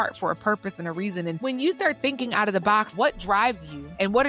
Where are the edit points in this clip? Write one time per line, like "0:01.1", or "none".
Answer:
0:01.3
0:02.9